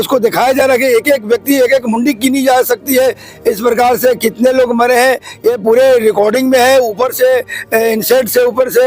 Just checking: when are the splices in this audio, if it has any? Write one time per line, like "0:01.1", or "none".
0:03.3